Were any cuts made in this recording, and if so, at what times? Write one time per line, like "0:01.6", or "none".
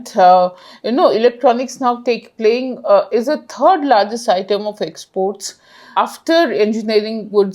0:05.9